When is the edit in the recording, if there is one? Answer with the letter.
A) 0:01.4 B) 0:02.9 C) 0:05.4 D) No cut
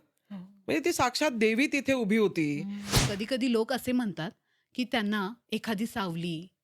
B